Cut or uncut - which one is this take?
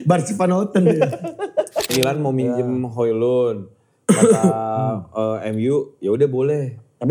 cut